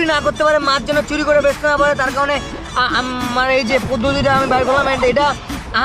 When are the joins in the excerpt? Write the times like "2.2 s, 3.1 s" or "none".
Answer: none

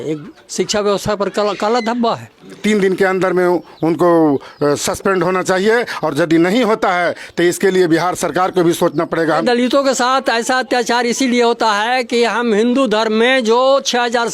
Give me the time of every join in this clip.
2.6 s, 9.4 s

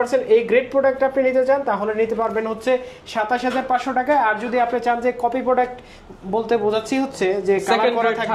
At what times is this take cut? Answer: none

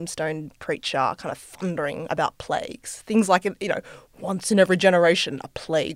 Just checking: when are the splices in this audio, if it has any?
none

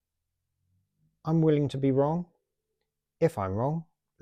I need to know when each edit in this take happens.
none

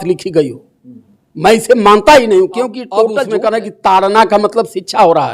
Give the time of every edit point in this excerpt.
3.2 s

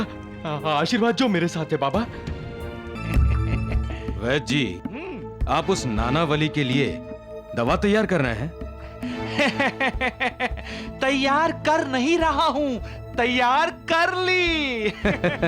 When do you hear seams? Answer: 3.0 s

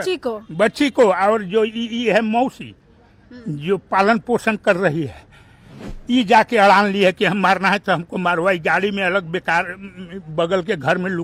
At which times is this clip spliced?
none

